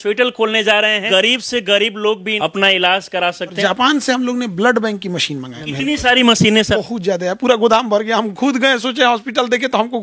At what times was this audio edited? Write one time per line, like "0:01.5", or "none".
0:01.0
0:02.3
0:03.6
0:05.6
0:06.8